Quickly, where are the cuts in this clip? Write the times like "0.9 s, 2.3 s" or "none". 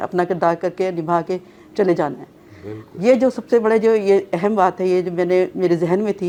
none